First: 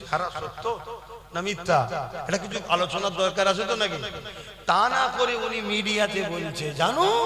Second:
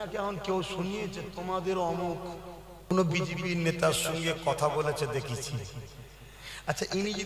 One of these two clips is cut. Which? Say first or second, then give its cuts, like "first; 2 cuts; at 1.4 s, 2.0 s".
second; 1 cut; at 2.9 s